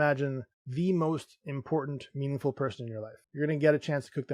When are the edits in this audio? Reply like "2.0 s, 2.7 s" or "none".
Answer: 3.2 s